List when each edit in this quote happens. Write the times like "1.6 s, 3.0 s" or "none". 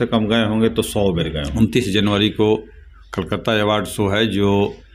1.4 s